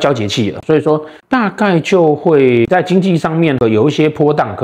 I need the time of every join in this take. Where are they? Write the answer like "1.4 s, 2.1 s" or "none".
2.7 s